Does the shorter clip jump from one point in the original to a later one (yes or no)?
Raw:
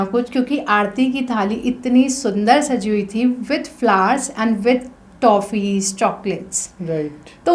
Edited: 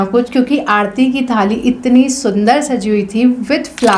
no